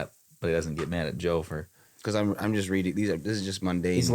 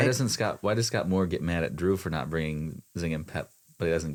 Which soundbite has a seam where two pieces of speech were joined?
first; 1 cut; at 1.8 s

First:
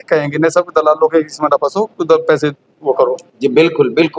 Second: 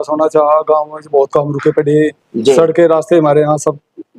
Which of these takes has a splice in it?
second; 1 cut; at 2.3 s

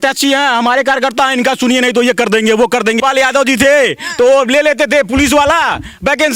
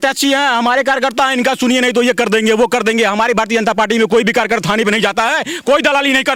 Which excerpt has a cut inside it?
first; 1 cut; at 3.0 s

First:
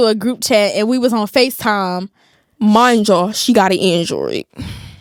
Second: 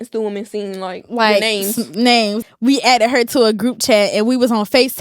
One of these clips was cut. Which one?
second; 1 cut; at 2.4 s

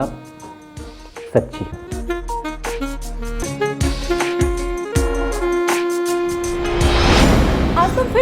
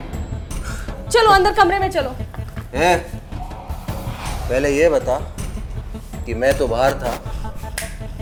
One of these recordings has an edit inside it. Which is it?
first; 2 cuts; at 3.5 s, 7.2 s

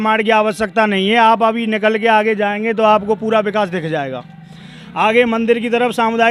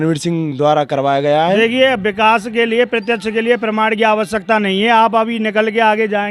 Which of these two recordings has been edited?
second; 1 cut; at 1.6 s

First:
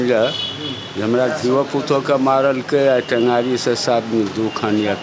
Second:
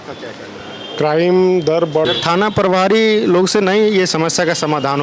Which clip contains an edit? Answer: second; 1 cut; at 2.1 s

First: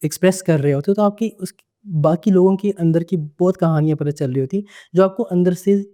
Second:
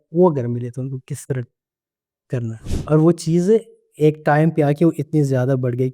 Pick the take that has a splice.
second; 1 cut; at 2.7 s

